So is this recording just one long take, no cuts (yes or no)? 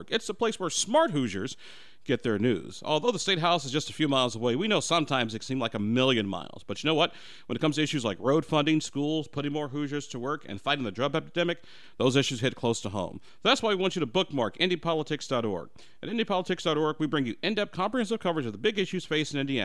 yes